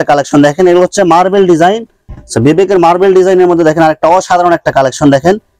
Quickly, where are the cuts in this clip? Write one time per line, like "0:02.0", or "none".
0:02.1